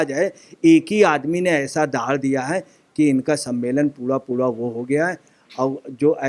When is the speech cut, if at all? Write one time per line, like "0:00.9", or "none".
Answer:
none